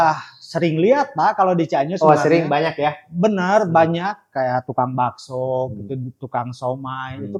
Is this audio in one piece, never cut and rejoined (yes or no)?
yes